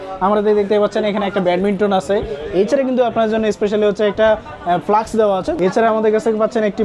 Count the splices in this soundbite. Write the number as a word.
one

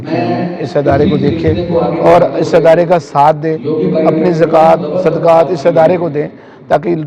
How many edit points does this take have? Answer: zero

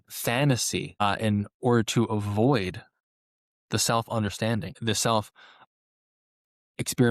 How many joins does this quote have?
two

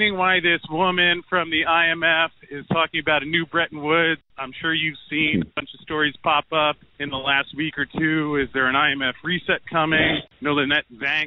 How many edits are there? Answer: three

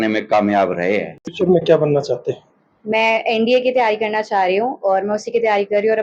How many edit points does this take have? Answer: one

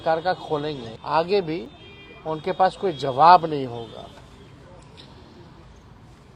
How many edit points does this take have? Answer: zero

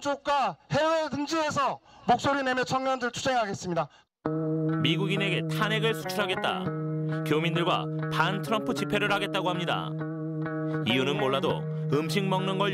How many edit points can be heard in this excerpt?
one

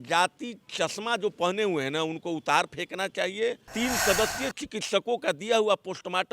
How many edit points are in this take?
one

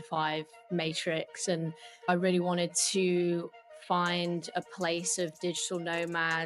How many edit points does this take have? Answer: one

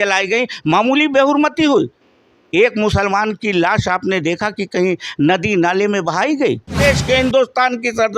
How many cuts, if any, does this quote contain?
one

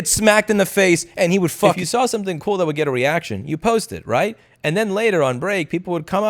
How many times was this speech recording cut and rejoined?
one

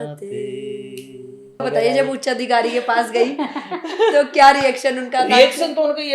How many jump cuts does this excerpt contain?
one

